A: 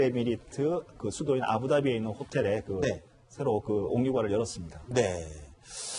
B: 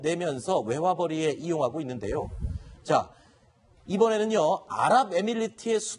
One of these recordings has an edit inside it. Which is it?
A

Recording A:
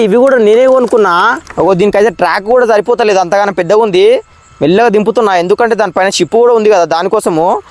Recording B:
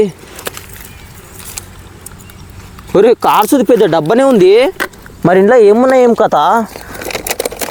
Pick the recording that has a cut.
A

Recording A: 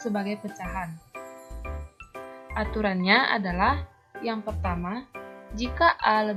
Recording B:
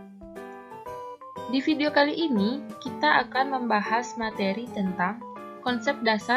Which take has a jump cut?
B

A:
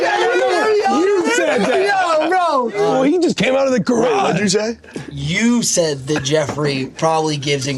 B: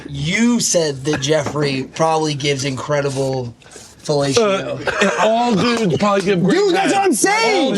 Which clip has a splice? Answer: A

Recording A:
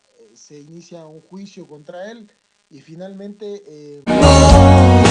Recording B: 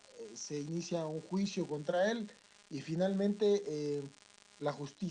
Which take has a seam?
B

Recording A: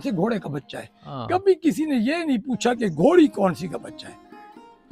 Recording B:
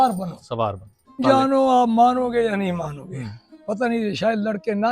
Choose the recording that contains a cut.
B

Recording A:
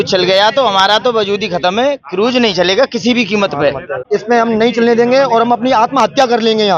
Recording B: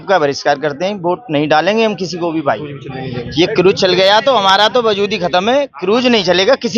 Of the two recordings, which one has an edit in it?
A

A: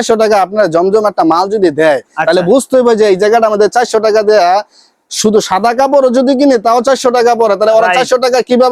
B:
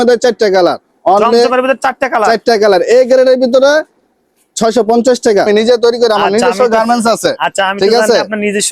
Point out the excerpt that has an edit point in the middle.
B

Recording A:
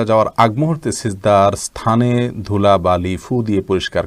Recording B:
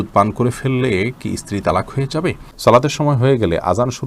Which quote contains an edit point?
B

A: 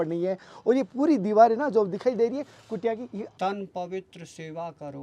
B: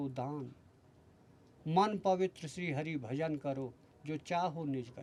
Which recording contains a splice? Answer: A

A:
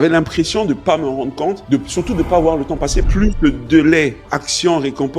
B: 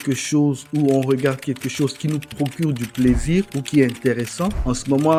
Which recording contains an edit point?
A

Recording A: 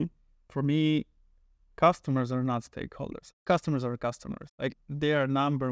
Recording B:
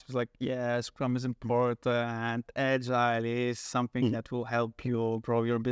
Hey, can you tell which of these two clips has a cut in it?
A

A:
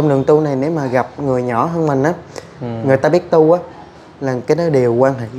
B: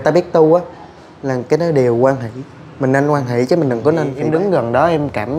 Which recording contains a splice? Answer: B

